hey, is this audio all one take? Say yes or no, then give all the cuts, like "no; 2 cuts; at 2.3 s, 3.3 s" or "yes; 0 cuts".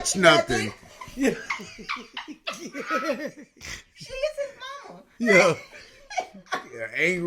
no; 1 cut; at 3.3 s